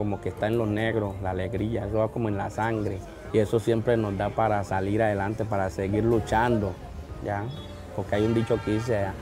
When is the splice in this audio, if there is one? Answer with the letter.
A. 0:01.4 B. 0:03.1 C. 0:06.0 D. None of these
D